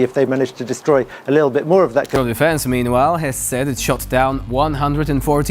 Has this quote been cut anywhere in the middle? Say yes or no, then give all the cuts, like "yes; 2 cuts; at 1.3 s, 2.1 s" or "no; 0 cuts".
yes; 1 cut; at 2.1 s